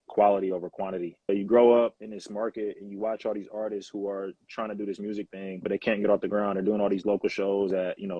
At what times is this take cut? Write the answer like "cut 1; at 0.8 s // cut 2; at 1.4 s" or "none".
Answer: cut 1; at 1.3 s